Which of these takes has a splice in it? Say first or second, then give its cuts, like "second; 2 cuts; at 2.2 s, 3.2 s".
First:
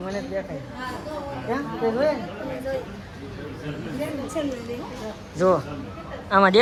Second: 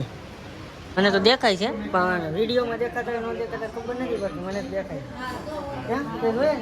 second; 1 cut; at 1.0 s